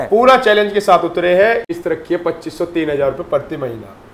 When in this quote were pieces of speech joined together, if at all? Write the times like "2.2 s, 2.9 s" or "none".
1.7 s